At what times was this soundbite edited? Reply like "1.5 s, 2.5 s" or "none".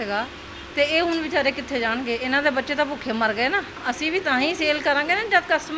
3.8 s